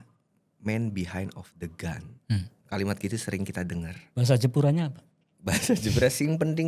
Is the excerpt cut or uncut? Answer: uncut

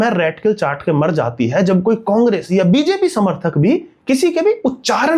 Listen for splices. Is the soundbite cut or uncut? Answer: uncut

